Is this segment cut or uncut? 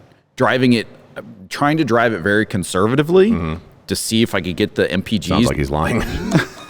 cut